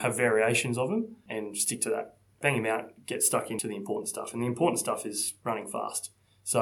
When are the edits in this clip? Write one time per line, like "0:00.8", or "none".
0:01.2
0:02.4
0:03.6